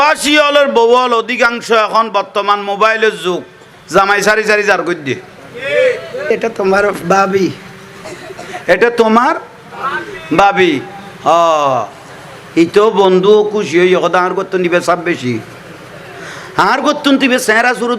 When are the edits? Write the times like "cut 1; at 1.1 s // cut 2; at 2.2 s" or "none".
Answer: cut 1; at 6.3 s